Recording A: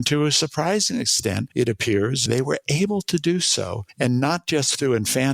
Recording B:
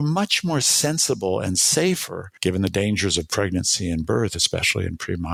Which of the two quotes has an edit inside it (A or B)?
A